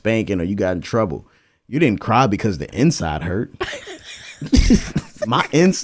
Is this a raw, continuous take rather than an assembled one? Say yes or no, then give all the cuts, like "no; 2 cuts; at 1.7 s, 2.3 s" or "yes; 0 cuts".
yes; 0 cuts